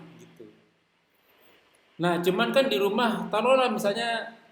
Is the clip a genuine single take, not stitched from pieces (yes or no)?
yes